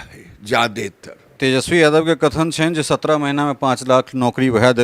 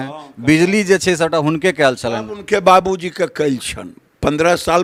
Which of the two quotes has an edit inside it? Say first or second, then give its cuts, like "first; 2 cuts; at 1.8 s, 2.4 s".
first; 1 cut; at 1.3 s